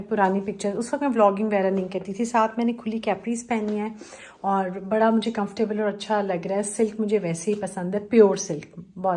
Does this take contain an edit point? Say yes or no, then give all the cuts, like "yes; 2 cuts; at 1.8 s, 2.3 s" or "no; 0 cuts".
no; 0 cuts